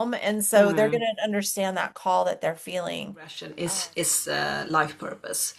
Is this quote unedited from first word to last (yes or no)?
no